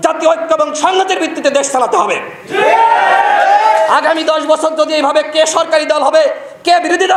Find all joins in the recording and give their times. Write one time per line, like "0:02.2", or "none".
none